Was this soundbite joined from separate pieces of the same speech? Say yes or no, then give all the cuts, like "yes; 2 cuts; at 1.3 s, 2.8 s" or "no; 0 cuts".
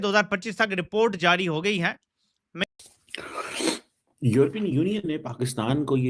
yes; 1 cut; at 2.6 s